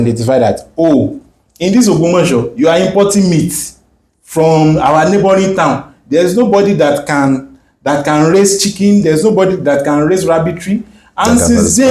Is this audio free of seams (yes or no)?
yes